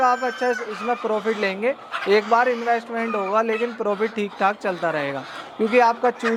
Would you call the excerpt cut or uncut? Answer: uncut